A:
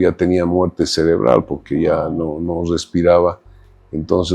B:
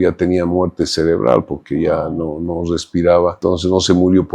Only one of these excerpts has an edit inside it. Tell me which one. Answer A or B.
B